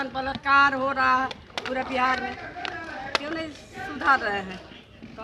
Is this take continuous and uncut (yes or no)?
yes